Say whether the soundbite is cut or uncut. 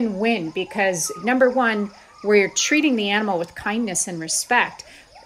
cut